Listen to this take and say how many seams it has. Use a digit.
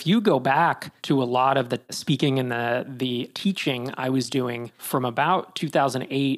3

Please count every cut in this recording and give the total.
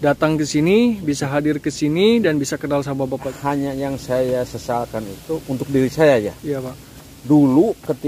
1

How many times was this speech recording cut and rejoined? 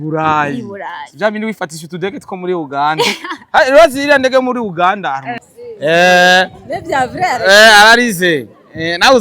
1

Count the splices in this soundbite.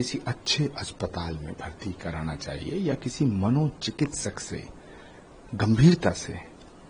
0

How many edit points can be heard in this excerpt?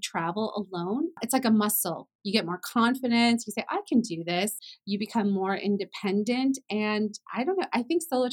2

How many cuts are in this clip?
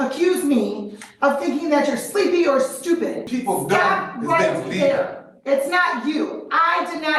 1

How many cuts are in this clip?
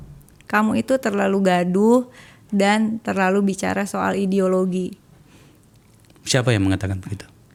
0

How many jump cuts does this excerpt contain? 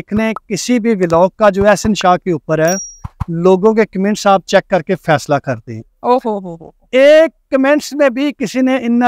0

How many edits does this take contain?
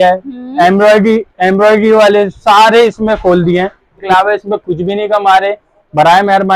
1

